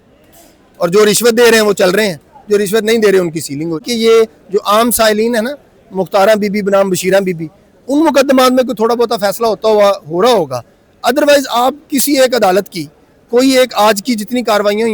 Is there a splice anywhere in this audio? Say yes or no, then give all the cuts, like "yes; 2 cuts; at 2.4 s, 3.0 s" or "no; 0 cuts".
yes; 1 cut; at 3.8 s